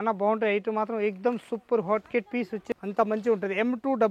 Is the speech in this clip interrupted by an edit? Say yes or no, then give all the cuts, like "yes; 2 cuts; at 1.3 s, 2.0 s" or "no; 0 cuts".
yes; 1 cut; at 2.6 s